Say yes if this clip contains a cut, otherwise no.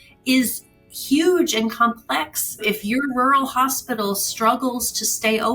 yes